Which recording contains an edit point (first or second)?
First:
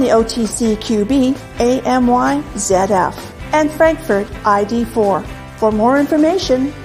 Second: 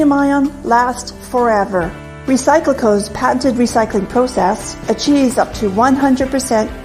second